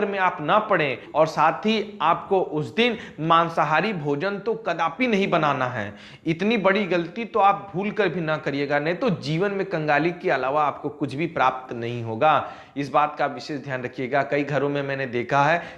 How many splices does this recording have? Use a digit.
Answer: 0